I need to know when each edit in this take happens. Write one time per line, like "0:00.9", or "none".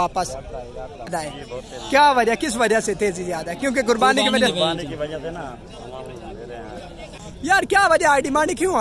0:01.1
0:07.0

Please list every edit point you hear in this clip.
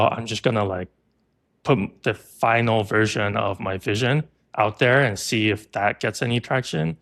none

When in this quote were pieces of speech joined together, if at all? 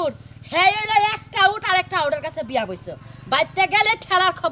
none

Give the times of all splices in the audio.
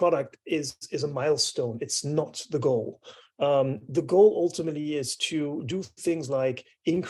none

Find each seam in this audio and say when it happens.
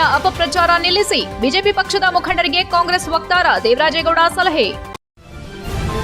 0:04.8

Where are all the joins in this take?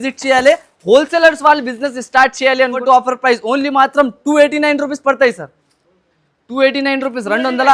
0:02.8

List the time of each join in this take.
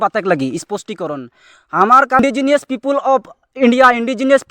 0:02.2

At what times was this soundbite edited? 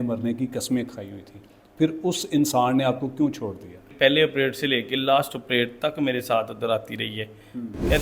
0:03.9

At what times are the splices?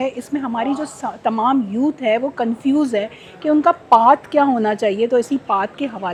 none

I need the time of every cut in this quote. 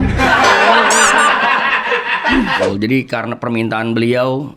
0:02.6

